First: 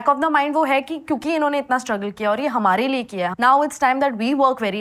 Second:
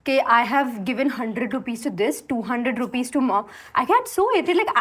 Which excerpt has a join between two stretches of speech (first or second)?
first